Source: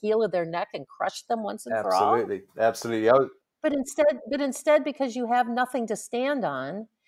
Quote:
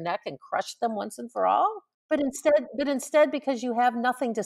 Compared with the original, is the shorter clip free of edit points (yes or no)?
no